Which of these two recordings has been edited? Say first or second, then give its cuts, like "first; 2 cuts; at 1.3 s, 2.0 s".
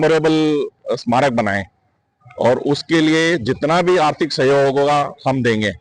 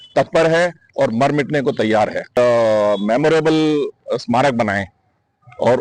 second; 1 cut; at 2.3 s